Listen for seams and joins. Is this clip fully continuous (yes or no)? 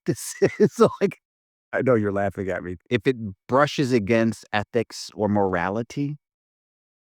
no